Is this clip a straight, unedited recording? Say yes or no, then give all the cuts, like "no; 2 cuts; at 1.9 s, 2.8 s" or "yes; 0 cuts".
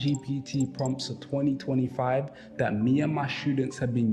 no; 1 cut; at 2.2 s